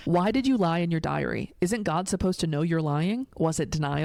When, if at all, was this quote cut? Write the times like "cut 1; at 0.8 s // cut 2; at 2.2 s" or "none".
none